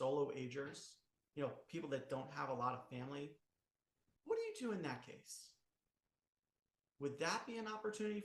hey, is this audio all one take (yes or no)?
yes